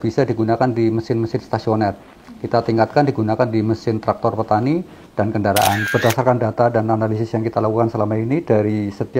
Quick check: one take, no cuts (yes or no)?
no